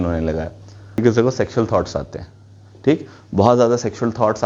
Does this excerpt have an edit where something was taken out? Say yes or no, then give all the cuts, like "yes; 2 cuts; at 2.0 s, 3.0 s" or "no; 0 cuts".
yes; 1 cut; at 1.0 s